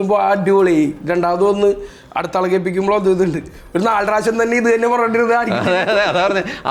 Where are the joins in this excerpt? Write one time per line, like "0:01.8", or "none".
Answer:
none

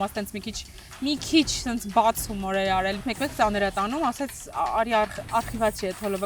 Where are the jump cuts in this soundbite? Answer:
0:03.0

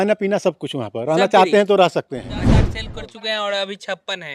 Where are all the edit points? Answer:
0:02.8

